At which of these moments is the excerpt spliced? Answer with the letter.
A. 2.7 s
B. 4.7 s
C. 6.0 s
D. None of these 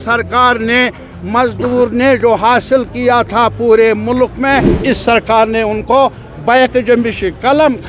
B